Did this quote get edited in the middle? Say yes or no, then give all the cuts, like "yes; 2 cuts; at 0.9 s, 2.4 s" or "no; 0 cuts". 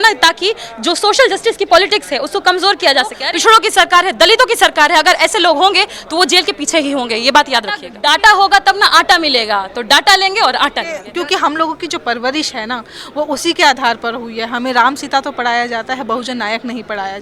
yes; 3 cuts; at 3.2 s, 7.9 s, 11.0 s